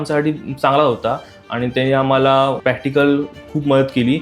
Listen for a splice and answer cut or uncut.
cut